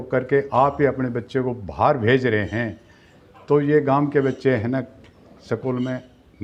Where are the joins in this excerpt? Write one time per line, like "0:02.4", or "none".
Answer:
none